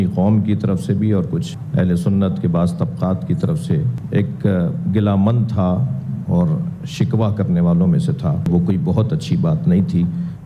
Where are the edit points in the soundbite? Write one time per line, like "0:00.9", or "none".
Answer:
0:08.5